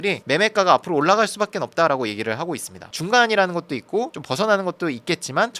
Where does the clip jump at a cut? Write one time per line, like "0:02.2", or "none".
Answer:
0:02.8